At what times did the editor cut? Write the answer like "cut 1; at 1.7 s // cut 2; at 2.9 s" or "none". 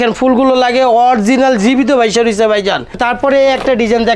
cut 1; at 3.0 s